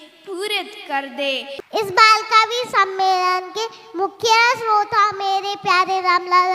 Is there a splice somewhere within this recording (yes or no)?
yes